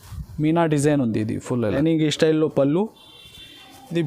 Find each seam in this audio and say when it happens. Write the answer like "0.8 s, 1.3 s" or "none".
1.8 s